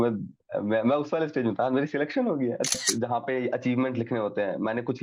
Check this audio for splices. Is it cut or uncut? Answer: cut